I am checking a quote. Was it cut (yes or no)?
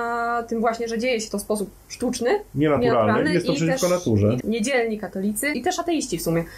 yes